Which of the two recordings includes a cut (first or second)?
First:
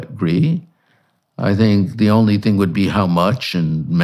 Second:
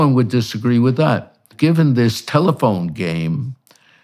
second